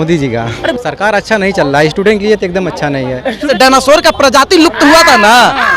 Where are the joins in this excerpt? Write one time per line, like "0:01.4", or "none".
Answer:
0:00.8
0:03.5